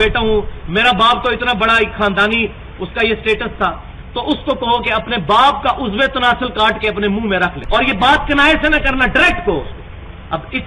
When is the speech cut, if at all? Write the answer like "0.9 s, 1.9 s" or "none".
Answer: 7.6 s